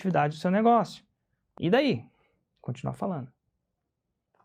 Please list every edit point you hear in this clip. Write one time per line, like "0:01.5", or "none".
0:01.4